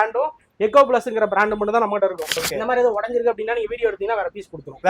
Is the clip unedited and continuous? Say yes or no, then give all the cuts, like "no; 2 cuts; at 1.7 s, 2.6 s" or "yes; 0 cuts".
no; 1 cut; at 2.3 s